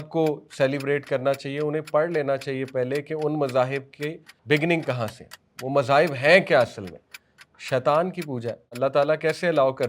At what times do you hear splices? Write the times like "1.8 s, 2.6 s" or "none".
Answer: 4.3 s, 8.8 s